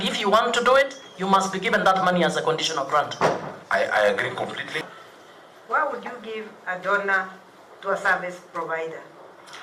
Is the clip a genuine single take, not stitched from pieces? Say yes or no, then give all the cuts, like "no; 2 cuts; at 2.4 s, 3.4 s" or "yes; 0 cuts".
no; 1 cut; at 4.7 s